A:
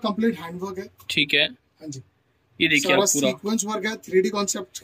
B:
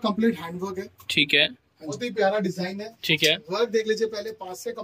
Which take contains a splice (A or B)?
B